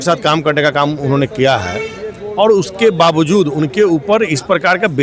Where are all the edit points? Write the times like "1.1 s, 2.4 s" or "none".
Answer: none